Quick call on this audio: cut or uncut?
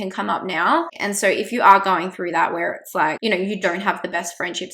cut